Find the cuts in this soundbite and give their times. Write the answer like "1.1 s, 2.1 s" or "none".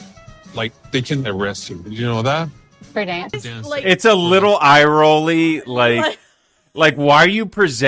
3.3 s